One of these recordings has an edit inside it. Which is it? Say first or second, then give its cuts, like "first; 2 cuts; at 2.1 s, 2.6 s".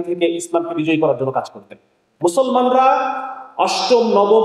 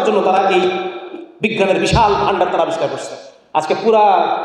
first; 1 cut; at 2.1 s